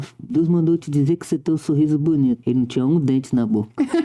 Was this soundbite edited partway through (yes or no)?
yes